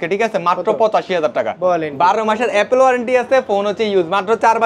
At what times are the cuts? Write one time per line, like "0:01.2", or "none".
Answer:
0:01.5